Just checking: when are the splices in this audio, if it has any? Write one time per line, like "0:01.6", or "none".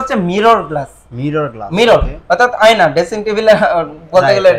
none